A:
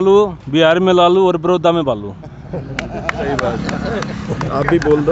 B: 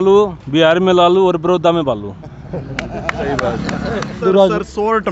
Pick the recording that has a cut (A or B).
B